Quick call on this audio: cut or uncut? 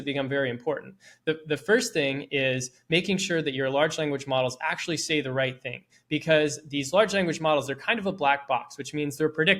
uncut